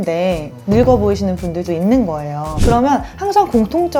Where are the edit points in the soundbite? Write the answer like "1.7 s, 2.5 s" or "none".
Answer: 1.6 s, 2.6 s